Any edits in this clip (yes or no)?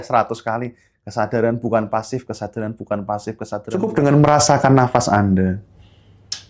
yes